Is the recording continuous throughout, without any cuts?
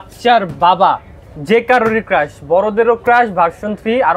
yes; 0 cuts

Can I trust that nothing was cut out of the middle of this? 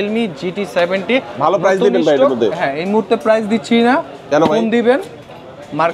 yes; 0 cuts

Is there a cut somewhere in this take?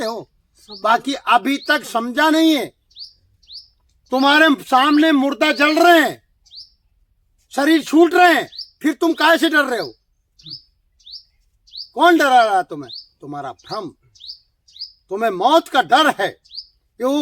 no; 0 cuts

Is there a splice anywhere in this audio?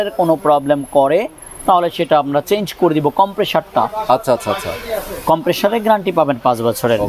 no; 0 cuts

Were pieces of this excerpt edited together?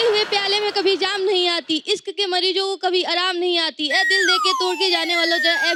no; 0 cuts

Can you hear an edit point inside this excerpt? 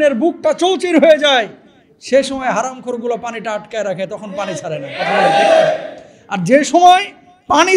no; 0 cuts

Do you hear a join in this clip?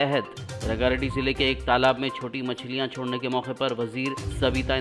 no; 0 cuts

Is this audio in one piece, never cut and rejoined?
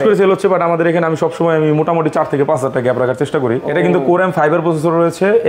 no; 1 cut; at 3.6 s

